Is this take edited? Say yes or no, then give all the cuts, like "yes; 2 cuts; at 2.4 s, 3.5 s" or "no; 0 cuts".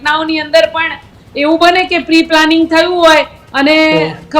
no; 0 cuts